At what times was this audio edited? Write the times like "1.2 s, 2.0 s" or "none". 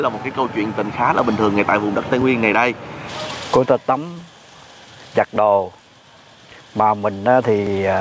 2.8 s